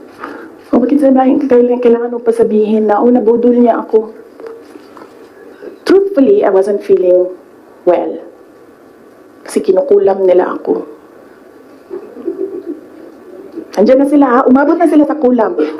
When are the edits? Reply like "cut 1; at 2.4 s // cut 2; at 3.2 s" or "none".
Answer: cut 1; at 5.5 s